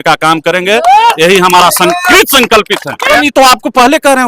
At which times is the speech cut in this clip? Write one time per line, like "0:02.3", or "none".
0:03.1